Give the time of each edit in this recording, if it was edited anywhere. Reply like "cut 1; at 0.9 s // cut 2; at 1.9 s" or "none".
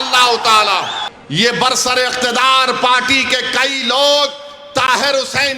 cut 1; at 1.1 s